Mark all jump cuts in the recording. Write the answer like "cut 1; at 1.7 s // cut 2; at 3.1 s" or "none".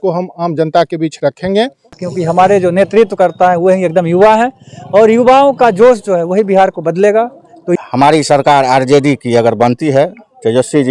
cut 1; at 2.0 s // cut 2; at 7.8 s